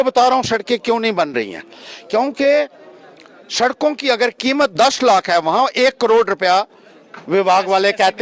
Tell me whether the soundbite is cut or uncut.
uncut